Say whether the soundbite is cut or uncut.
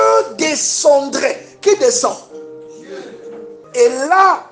cut